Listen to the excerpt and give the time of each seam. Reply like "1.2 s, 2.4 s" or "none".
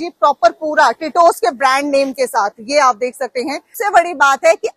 3.8 s